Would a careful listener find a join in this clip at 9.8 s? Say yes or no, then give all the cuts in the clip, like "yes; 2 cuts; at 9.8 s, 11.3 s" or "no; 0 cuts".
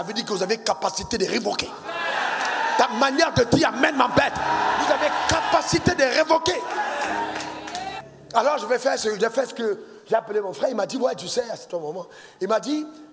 no; 1 cut; at 7.9 s